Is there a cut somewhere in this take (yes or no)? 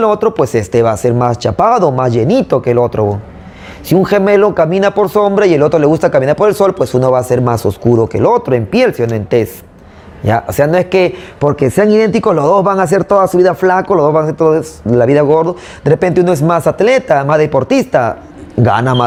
no